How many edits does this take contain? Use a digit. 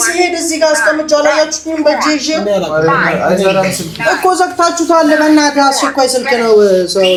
0